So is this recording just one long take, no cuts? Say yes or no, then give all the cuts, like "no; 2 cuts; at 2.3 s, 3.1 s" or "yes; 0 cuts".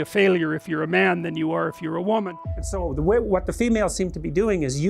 no; 1 cut; at 2.5 s